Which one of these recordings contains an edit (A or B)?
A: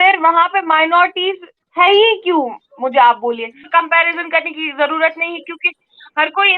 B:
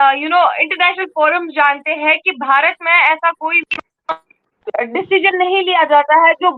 A